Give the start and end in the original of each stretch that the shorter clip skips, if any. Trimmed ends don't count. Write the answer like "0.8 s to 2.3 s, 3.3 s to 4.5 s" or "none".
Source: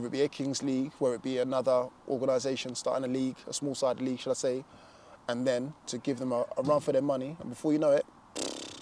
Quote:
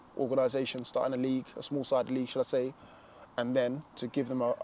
none